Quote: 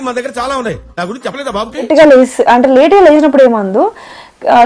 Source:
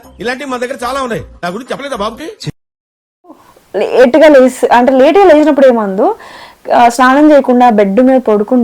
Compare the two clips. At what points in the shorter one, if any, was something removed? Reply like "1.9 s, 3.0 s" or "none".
1.9 s